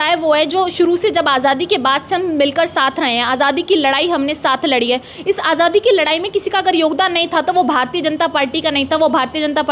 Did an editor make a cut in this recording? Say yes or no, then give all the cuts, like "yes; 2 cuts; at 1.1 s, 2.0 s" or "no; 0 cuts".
no; 0 cuts